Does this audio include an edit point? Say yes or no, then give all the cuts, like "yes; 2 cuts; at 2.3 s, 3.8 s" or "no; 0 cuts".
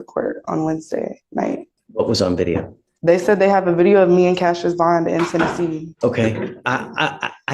yes; 2 cuts; at 1.8 s, 5.9 s